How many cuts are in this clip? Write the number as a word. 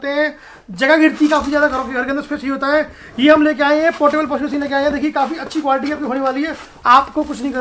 one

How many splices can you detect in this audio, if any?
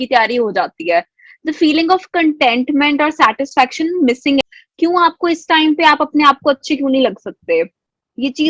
one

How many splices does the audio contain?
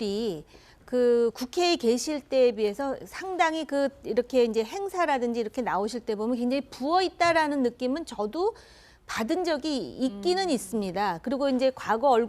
one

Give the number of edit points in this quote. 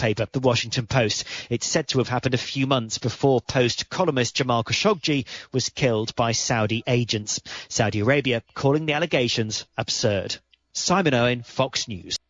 one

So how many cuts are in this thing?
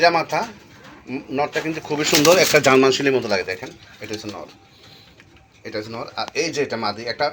zero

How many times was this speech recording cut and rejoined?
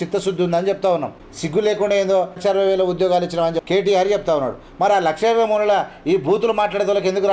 three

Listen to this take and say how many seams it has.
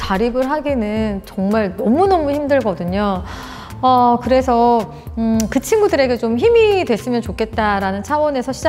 zero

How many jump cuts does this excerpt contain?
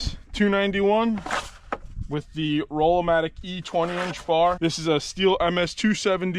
one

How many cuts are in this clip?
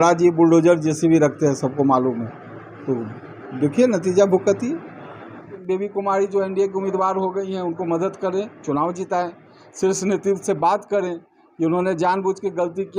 one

